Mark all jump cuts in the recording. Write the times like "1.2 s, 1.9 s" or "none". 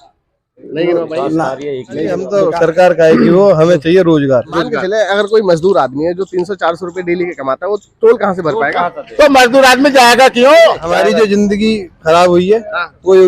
2.2 s, 4.8 s, 11.0 s